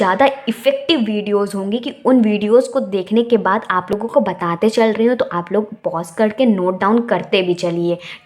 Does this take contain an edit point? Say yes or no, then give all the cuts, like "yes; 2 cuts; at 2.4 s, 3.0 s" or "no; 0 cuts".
yes; 1 cut; at 4.0 s